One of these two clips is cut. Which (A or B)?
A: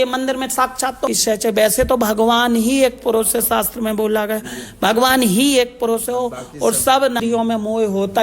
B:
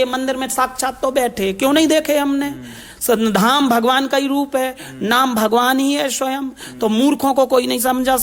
A